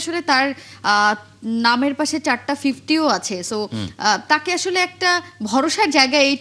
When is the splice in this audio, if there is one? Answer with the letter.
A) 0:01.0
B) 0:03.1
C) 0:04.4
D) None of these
D